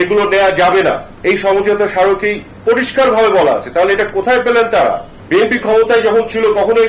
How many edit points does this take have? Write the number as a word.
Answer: one